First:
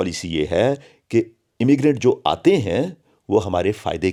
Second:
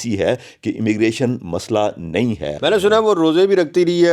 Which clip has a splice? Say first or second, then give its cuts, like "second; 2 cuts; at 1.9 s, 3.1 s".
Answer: second; 1 cut; at 2.5 s